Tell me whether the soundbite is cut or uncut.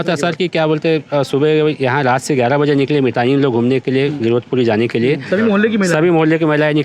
uncut